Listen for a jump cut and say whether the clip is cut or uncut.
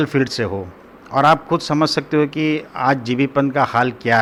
uncut